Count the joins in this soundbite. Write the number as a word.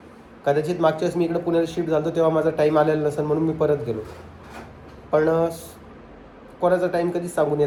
zero